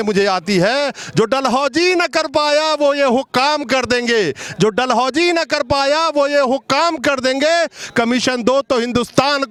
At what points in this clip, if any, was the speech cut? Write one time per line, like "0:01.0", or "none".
none